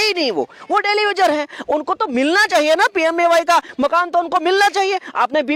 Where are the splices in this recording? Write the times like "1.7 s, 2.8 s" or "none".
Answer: none